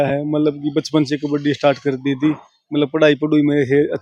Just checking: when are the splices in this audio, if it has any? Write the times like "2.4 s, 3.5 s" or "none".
none